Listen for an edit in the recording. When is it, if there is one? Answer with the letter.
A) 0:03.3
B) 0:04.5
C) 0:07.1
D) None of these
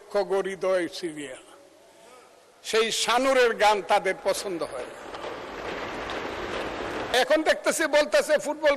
C